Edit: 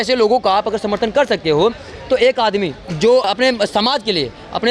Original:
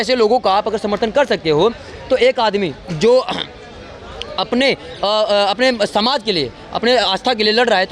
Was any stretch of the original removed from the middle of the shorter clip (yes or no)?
yes